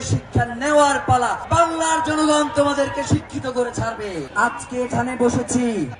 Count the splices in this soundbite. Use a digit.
2